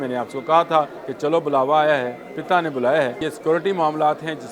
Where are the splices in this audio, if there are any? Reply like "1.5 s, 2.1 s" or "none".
1.0 s, 3.2 s